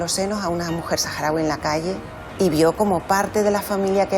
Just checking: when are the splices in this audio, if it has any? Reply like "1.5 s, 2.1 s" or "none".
2.2 s